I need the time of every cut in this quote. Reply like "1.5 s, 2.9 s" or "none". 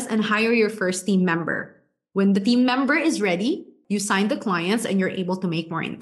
3.7 s